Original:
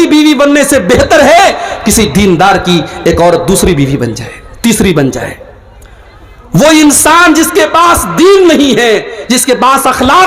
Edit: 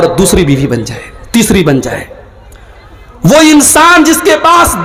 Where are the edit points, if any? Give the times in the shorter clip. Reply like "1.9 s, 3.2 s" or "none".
none